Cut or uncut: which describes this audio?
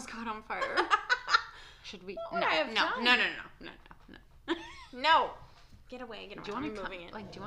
uncut